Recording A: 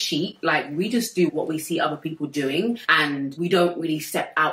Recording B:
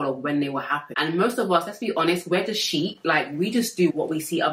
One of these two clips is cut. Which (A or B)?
B